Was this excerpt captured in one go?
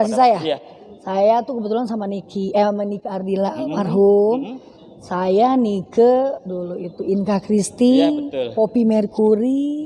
yes; 0 cuts

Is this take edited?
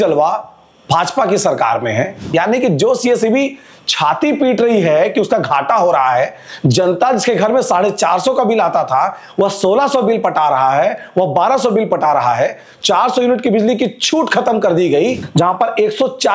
yes; 2 cuts; at 2.2 s, 15.2 s

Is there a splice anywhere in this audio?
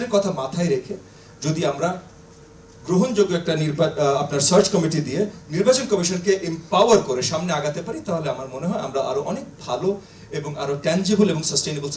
no; 0 cuts

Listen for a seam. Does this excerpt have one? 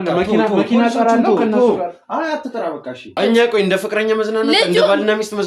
yes; 1 cut; at 3.2 s

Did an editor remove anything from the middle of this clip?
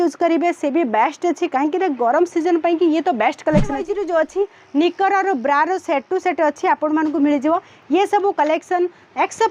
yes; 1 cut; at 3.8 s

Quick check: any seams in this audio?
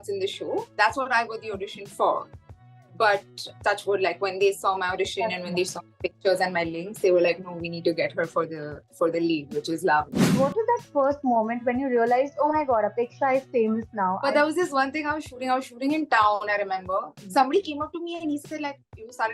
yes; 3 cuts; at 10.3 s, 14.2 s, 17.1 s

